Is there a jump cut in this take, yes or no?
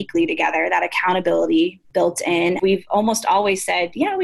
yes